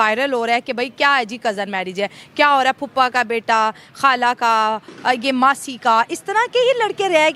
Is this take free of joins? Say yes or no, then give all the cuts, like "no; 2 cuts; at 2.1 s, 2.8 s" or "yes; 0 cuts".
yes; 0 cuts